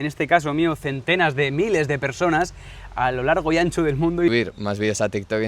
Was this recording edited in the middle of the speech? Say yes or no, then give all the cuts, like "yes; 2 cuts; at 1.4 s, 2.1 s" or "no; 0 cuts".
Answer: yes; 1 cut; at 4.3 s